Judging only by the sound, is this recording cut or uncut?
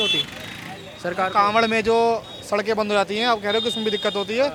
uncut